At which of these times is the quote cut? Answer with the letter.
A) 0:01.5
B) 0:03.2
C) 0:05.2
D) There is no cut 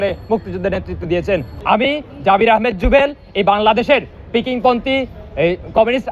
A